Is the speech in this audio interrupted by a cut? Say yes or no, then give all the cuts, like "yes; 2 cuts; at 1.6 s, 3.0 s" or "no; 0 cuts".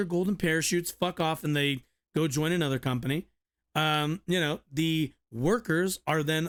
no; 0 cuts